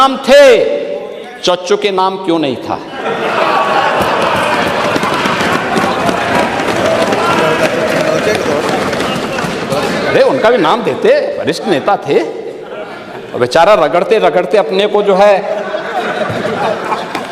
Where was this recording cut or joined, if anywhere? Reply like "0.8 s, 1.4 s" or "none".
none

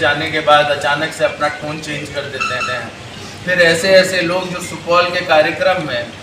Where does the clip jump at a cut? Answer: none

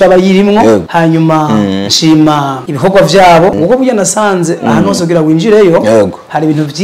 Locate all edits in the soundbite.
0.9 s, 2.6 s, 3.5 s

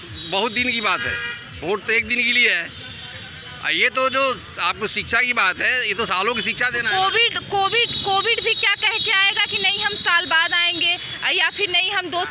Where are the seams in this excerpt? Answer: none

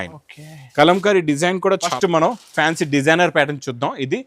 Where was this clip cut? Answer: 1.9 s

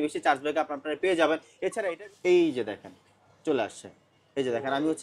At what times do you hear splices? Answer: 1.7 s

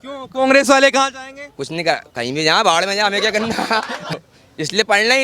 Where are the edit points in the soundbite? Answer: 4.1 s

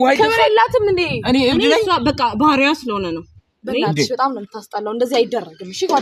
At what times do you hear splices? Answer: none

